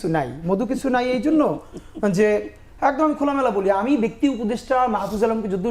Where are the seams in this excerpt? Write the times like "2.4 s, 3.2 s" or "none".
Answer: none